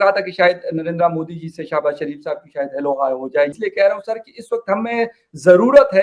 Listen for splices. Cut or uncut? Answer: cut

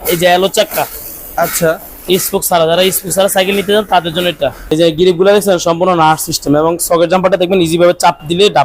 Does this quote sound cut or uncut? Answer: cut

